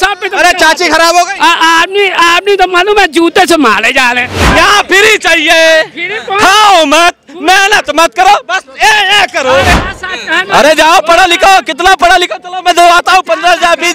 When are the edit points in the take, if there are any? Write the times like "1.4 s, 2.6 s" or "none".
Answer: 4.4 s, 9.7 s